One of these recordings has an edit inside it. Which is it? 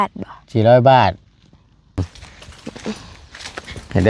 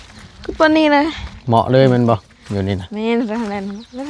first; 1 cut; at 2.0 s

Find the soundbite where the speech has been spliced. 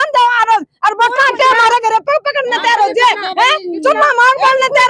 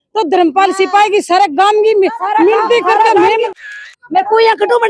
second; 1 cut; at 3.6 s

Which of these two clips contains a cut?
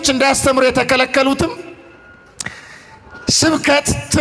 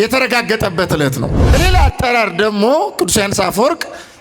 second; 1 cut; at 1.5 s

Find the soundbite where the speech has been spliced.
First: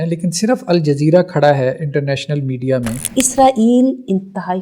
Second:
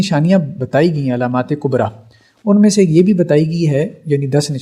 first; 1 cut; at 3.1 s

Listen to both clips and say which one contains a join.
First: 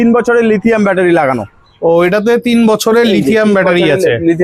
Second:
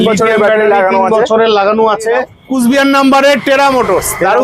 second; 1 cut; at 2.4 s

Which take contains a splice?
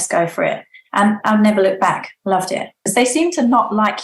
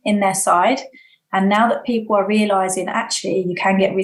first; 1 cut; at 2.8 s

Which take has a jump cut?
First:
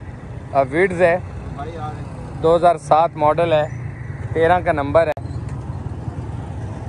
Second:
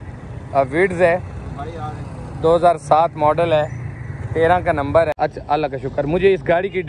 second; 1 cut; at 5.2 s

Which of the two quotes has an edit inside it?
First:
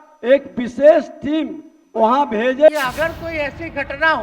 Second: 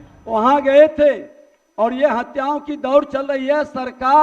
first; 1 cut; at 2.7 s

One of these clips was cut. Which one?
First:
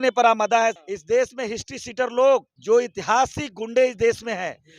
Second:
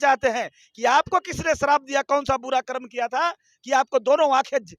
first; 2 cuts; at 0.8 s, 2.5 s

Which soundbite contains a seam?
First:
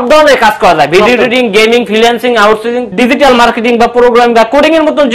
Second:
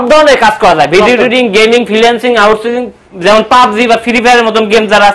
first; 1 cut; at 2.9 s

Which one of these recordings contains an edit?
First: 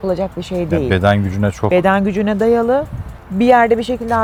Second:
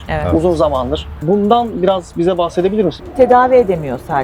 second; 2 cuts; at 1.1 s, 3.0 s

